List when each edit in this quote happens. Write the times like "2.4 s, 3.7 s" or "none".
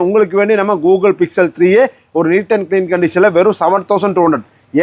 none